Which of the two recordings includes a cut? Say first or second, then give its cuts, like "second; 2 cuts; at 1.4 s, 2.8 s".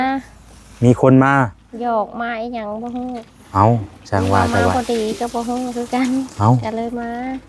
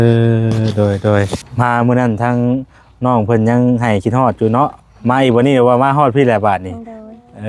second; 1 cut; at 1.4 s